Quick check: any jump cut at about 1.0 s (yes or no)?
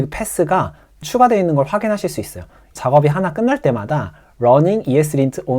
yes